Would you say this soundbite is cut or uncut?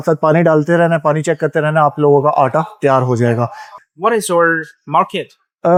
uncut